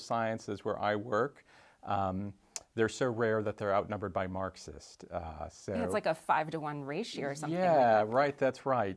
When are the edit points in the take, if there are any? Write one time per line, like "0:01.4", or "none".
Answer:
none